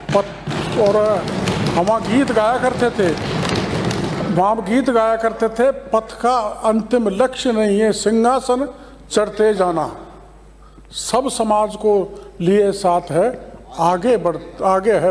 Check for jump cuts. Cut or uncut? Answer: uncut